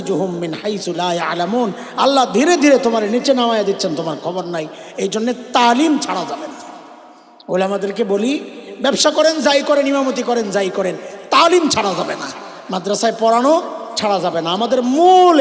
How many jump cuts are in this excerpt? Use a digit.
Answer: 0